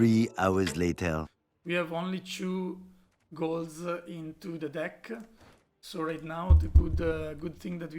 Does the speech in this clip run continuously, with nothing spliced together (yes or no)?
no